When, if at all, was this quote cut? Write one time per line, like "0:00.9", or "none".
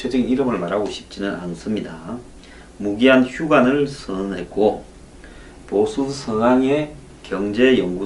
none